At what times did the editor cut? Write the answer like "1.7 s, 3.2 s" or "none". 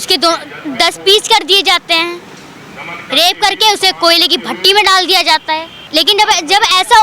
5.8 s